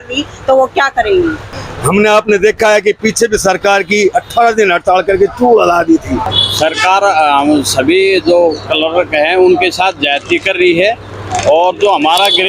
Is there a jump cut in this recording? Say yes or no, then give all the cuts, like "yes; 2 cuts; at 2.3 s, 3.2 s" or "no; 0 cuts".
yes; 2 cuts; at 1.5 s, 6.4 s